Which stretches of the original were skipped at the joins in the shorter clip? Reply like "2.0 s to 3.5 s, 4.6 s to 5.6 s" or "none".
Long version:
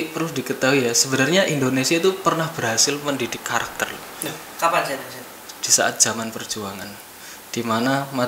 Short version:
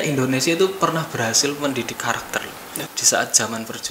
3.8 s to 5.0 s